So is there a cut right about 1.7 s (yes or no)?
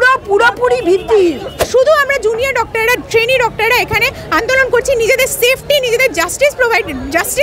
yes